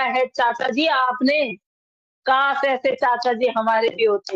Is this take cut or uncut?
uncut